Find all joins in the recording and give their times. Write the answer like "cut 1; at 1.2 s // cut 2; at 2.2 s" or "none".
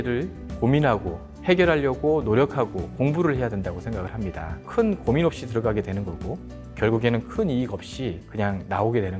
cut 1; at 4.6 s // cut 2; at 8.2 s